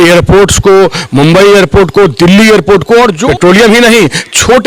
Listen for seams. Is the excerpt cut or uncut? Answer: cut